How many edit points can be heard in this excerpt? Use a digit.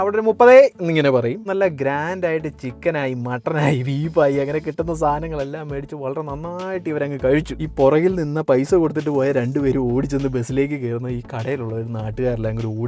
2